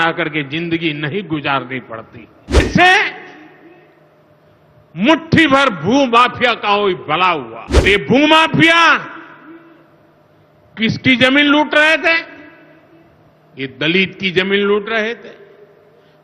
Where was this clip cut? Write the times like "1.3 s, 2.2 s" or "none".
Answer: 2.6 s, 7.8 s

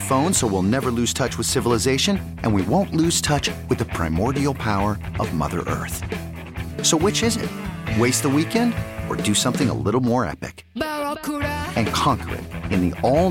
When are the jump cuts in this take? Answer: none

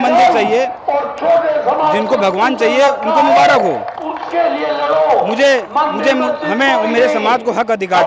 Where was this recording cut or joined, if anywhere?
none

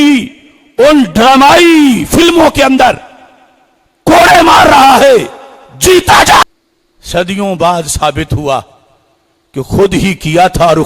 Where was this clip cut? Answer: 6.4 s

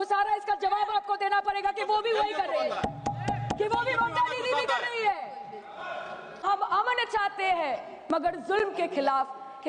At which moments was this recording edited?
6.4 s

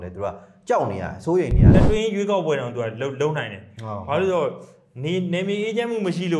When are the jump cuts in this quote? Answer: 1.7 s

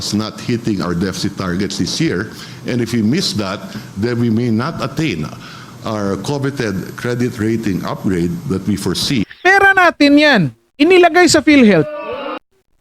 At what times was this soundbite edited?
9.3 s

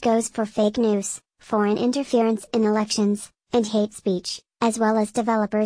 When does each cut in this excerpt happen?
none

